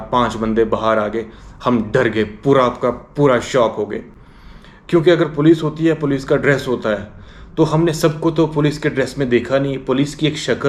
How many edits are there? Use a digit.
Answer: 0